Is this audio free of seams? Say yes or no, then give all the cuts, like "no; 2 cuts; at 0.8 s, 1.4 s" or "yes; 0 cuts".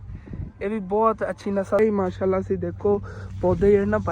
no; 1 cut; at 1.8 s